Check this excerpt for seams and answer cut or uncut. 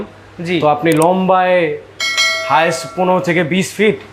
uncut